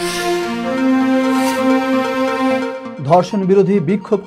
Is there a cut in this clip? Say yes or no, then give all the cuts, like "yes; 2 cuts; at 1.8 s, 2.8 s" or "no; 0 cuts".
no; 0 cuts